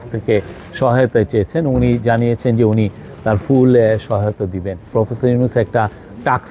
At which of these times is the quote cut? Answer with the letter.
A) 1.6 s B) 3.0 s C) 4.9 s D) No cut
C